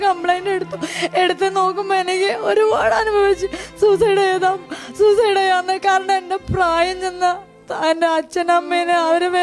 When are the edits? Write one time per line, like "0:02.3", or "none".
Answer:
none